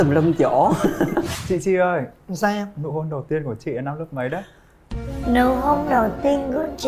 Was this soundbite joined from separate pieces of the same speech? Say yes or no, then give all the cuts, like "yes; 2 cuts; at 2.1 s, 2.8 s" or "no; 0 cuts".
yes; 1 cut; at 1.4 s